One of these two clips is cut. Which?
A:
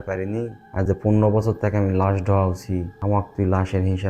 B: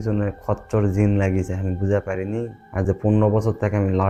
A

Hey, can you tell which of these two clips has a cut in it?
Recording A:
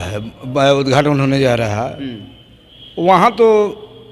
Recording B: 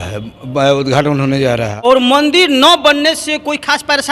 B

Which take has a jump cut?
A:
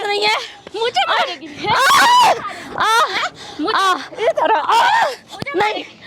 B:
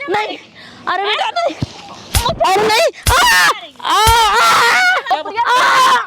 B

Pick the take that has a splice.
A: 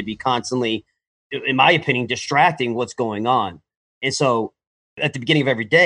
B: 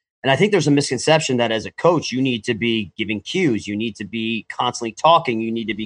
A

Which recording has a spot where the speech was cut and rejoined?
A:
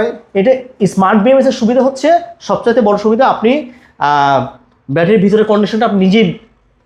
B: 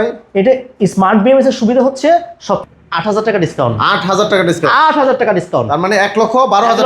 B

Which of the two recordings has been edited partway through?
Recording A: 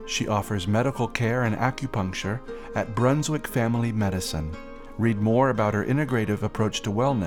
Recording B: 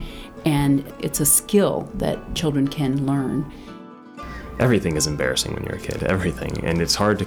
B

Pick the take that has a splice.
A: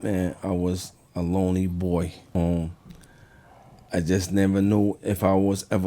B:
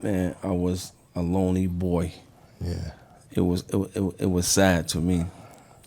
A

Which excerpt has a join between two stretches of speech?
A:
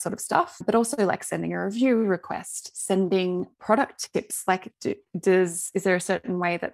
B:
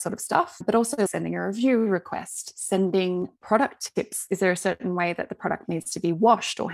B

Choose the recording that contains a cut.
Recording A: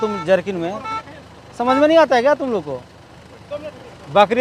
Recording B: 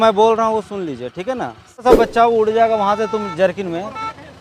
B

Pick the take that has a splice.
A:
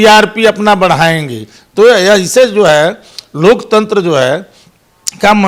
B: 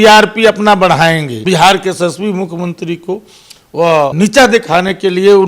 B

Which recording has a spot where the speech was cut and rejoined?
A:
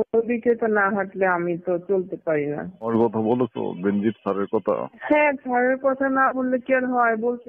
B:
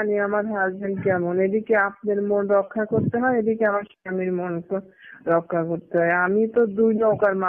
A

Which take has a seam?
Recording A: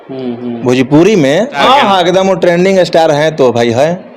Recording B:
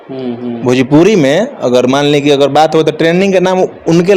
A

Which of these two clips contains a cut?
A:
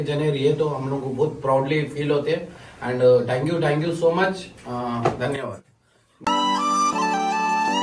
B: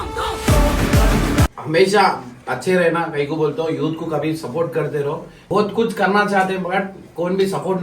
B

